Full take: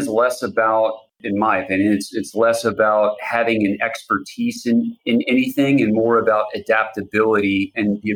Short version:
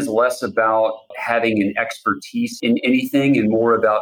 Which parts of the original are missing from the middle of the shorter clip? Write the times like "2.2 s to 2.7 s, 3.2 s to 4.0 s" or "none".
1.2 s to 3.2 s, 4.6 s to 5.0 s